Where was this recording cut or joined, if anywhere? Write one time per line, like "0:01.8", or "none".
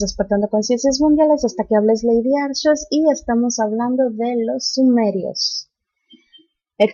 none